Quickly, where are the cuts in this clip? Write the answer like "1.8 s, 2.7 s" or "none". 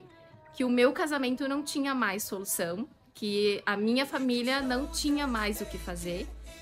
none